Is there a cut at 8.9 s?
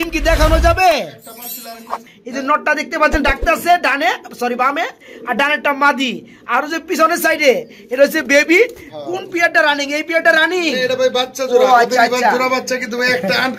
yes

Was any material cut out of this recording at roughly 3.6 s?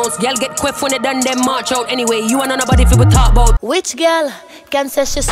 yes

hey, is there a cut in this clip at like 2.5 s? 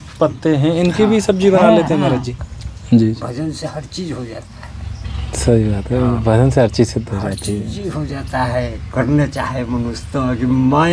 yes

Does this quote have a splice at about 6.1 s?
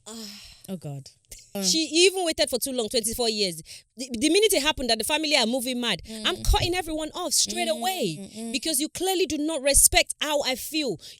no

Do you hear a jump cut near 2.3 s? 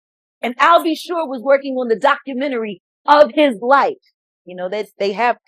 no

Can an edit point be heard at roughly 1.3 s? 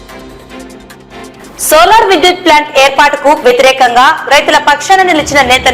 yes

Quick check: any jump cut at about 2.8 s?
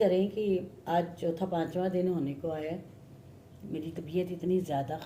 no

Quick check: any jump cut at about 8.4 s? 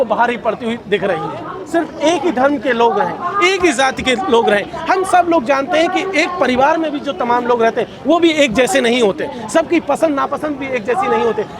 no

